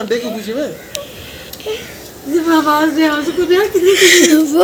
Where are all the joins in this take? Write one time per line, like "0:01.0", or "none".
none